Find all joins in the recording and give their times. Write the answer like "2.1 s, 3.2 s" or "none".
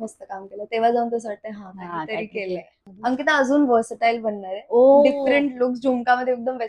2.8 s